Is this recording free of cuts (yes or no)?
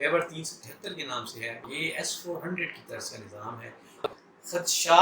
no